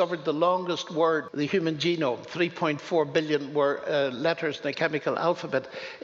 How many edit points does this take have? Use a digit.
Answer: 1